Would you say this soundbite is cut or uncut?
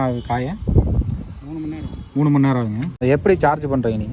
cut